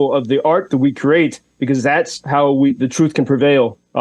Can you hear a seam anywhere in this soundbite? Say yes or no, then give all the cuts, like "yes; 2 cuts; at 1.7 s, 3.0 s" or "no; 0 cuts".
no; 0 cuts